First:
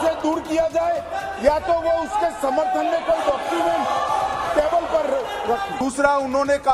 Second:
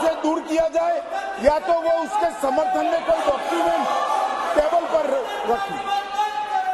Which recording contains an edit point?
first; 1 cut; at 5.8 s

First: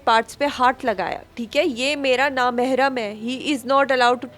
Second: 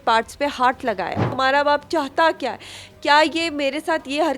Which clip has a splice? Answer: second; 1 cut; at 1.2 s

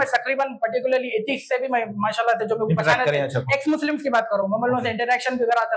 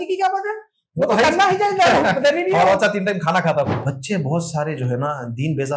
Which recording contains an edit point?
second; 1 cut; at 3.7 s

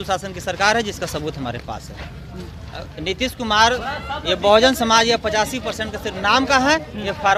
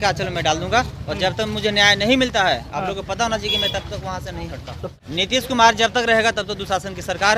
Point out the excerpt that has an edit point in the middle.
second; 1 cut; at 4.9 s

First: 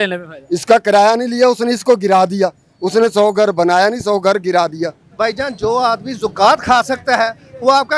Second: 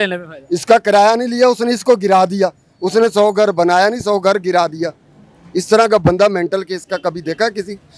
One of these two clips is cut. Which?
first; 1 cut; at 5.0 s

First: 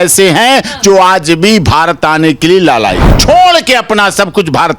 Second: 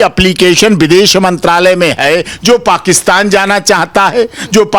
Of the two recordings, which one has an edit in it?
first; 1 cut; at 3.1 s

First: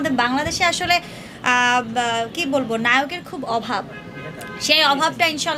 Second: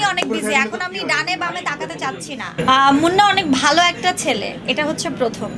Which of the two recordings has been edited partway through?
second; 1 cut; at 2.6 s

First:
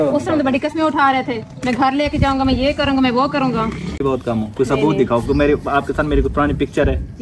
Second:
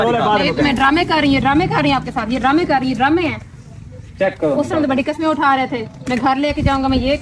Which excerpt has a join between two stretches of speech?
first; 1 cut; at 4.0 s

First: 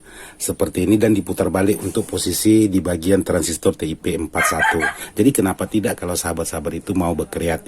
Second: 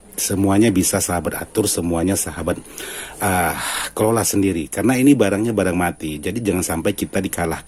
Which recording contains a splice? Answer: first; 1 cut; at 5.0 s

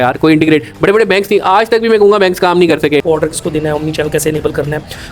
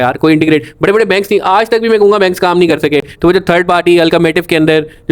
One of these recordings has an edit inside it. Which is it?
first; 1 cut; at 3.0 s

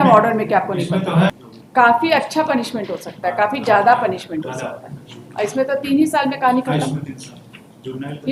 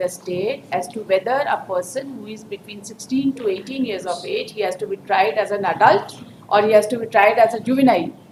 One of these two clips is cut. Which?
first; 1 cut; at 1.3 s

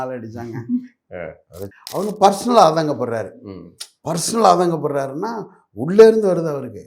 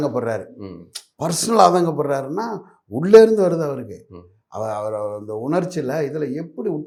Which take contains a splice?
first; 1 cut; at 1.7 s

